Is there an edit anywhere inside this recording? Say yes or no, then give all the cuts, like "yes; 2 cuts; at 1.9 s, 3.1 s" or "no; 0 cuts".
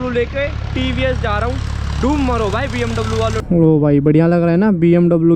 yes; 1 cut; at 3.4 s